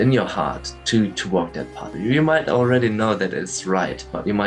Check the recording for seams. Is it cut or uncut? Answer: cut